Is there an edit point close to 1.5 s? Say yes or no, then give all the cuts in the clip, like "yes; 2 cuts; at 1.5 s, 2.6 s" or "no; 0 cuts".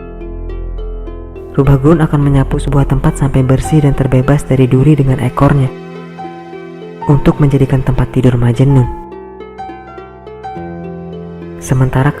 yes; 1 cut; at 1.5 s